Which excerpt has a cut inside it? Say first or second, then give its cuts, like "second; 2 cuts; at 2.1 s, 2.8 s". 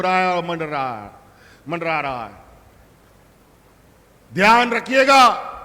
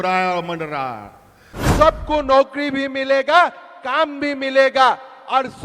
second; 1 cut; at 1.6 s